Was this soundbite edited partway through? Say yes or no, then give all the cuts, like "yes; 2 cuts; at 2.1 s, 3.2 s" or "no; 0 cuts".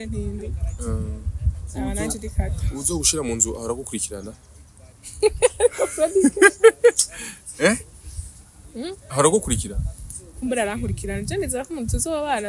no; 0 cuts